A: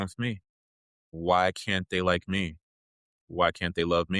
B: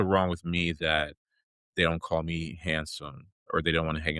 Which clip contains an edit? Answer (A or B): A